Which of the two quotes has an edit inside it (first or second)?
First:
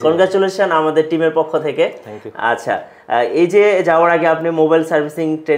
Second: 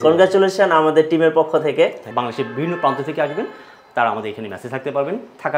second